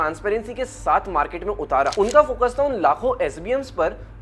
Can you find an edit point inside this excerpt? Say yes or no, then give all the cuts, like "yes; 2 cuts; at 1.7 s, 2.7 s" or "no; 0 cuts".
yes; 1 cut; at 1.9 s